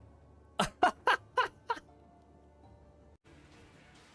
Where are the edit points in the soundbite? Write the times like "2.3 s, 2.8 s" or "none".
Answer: 3.2 s